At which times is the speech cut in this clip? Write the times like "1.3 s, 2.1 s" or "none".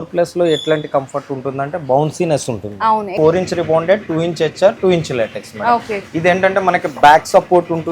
3.1 s

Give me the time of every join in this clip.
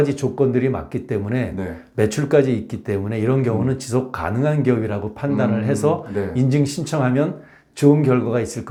none

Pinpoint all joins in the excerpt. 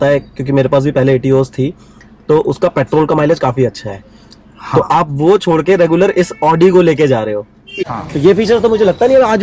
7.8 s

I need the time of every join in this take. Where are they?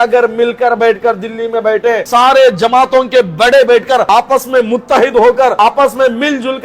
2.0 s, 4.1 s, 5.5 s

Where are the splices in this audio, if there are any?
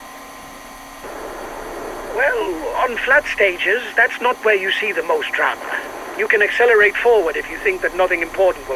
1.0 s

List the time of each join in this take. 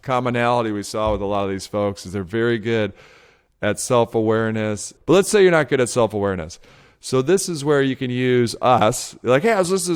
4.9 s

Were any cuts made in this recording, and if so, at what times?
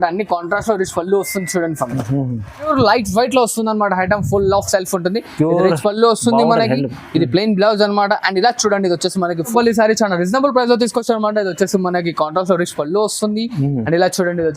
2.7 s, 9.5 s

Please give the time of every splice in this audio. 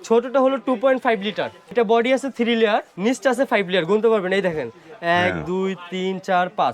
1.7 s, 2.9 s

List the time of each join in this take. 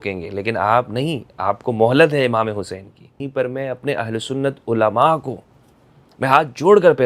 3.2 s

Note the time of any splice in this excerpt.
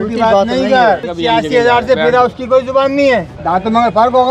1.1 s, 3.3 s

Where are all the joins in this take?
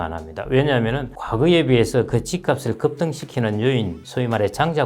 1.1 s

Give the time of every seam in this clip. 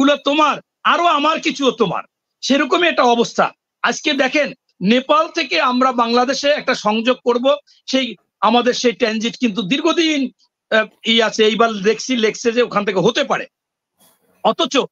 none

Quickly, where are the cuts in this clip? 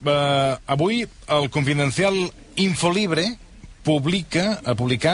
none

